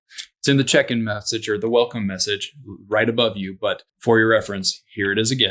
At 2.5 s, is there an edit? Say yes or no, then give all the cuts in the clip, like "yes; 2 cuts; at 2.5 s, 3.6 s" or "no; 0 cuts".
no; 1 cut; at 3.9 s